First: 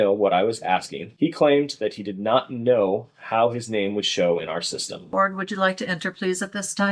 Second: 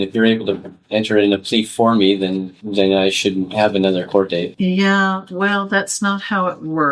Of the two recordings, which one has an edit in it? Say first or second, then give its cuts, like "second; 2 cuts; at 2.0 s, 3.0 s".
first; 2 cuts; at 1.0 s, 5.1 s